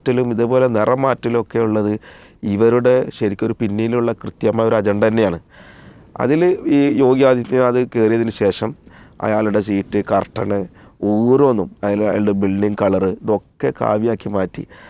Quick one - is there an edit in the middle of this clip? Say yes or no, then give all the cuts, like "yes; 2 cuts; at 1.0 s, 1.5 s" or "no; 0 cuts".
no; 0 cuts